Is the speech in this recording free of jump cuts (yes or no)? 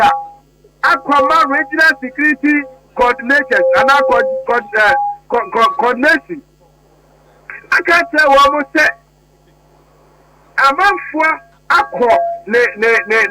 no